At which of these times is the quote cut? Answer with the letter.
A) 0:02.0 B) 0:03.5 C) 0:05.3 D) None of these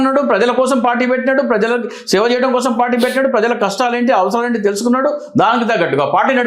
D